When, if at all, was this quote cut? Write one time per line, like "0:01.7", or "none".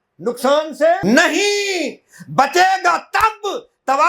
0:01.0